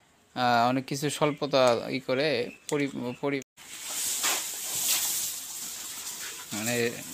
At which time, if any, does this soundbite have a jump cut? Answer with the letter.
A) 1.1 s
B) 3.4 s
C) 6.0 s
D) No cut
B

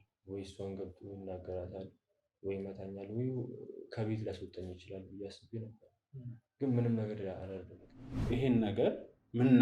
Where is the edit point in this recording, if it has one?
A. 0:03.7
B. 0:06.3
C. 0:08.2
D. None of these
C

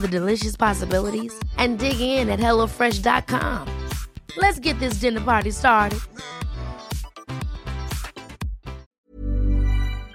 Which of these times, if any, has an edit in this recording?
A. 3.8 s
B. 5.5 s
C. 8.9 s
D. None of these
C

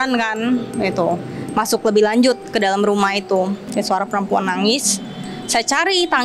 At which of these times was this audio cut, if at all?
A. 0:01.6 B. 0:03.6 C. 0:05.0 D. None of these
B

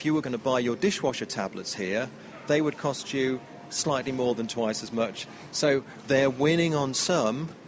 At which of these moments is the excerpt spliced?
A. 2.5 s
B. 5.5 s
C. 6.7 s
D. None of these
B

